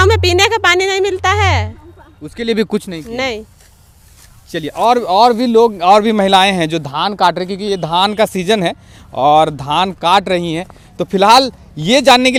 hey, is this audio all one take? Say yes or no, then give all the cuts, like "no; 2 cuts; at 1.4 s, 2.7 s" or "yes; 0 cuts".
yes; 0 cuts